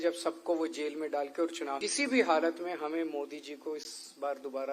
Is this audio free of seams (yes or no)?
no